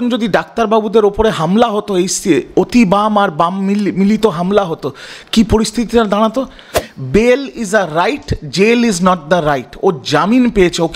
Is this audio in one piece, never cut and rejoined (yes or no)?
no